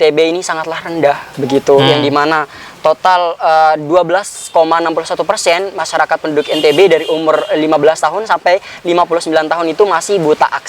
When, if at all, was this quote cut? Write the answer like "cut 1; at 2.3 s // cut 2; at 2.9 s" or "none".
none